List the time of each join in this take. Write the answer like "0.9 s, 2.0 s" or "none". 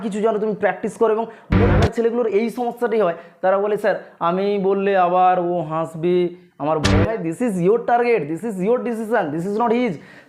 1.7 s, 7.0 s